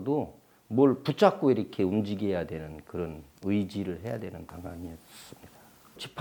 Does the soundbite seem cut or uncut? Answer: uncut